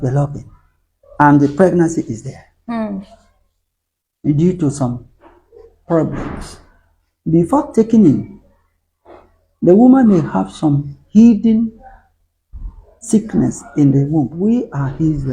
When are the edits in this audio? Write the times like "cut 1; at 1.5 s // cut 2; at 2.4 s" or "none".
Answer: cut 1; at 14.3 s